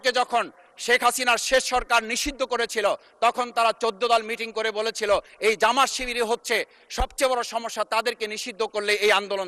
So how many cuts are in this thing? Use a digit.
0